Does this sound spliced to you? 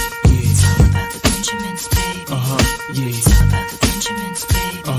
yes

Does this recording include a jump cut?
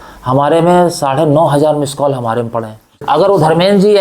yes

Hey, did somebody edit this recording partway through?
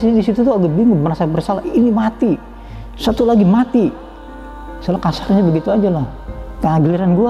no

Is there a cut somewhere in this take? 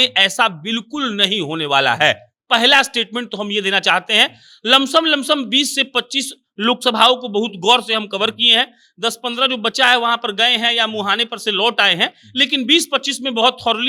no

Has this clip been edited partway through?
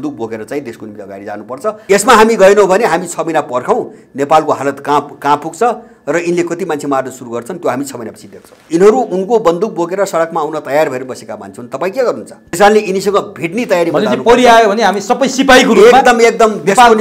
yes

